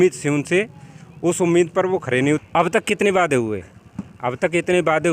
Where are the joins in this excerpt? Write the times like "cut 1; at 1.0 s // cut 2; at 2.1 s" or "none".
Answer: cut 1; at 2.4 s

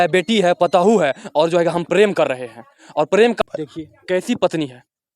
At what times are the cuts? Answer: cut 1; at 3.4 s

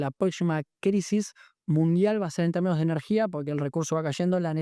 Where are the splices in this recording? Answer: none

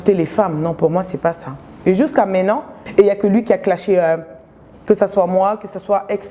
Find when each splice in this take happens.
cut 1; at 2.8 s

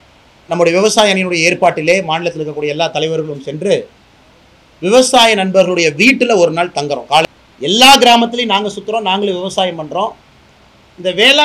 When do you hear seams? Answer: cut 1; at 7.2 s

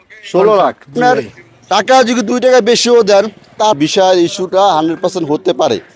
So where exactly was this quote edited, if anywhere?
cut 1; at 0.9 s // cut 2; at 3.8 s

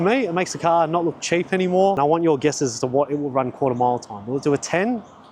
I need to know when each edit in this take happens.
cut 1; at 2.0 s

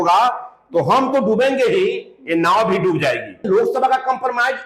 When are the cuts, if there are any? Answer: cut 1; at 3.4 s

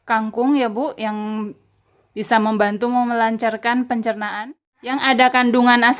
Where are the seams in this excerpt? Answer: cut 1; at 5.0 s

